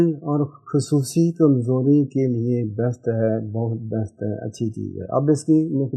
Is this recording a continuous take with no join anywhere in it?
yes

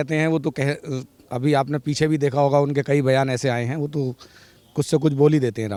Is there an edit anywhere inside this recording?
no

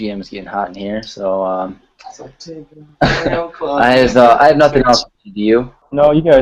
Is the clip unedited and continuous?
yes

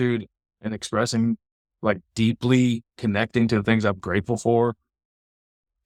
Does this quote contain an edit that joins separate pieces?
no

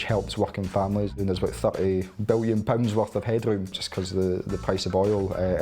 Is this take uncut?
no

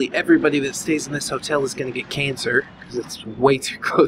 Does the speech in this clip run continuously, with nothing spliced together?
yes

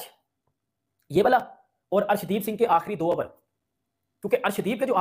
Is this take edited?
no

